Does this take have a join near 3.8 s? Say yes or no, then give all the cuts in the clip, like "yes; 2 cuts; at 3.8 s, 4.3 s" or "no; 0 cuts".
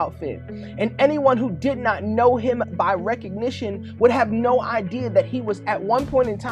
no; 0 cuts